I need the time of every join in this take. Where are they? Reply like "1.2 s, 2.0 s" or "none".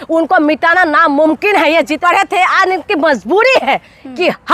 2.0 s

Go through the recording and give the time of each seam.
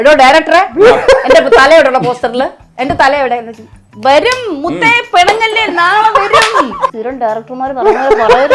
7.0 s

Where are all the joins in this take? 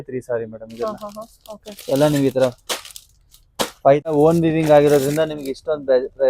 4.1 s

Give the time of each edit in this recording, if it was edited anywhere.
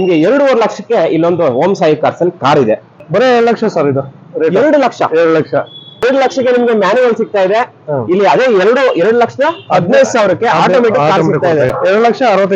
2.9 s, 6.0 s, 11.7 s

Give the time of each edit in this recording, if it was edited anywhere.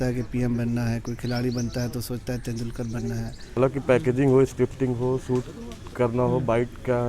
3.4 s

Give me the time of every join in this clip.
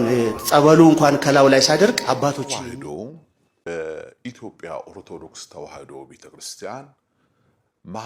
2.5 s

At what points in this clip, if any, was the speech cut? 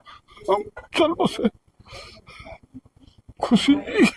none

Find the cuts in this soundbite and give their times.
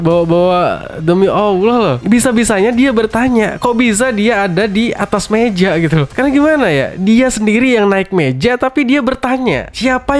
6.1 s

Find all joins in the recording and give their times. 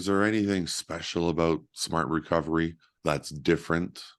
2.9 s

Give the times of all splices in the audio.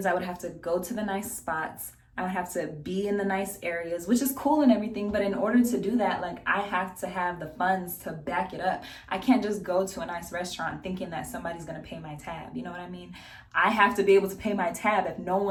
none

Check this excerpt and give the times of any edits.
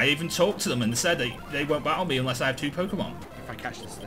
none

